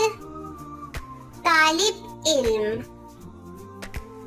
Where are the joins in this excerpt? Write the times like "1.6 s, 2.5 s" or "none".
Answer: 2.9 s